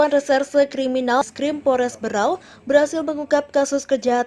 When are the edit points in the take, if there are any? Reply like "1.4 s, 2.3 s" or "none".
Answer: 1.3 s

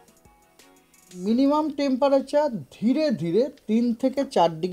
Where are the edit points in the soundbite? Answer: 1.2 s

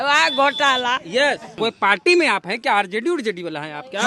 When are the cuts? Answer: 1.5 s

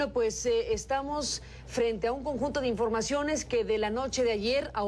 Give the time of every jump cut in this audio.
3.7 s

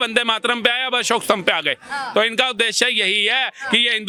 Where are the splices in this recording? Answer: none

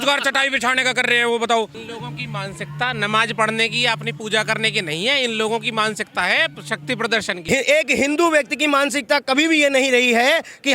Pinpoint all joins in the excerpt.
1.9 s, 7.4 s

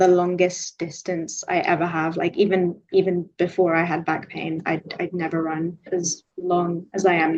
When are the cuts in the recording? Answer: 5.8 s

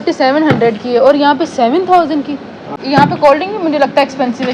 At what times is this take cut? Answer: 2.8 s

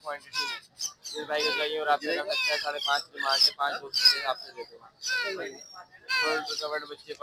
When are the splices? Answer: none

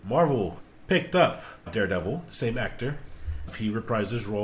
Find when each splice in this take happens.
3.4 s

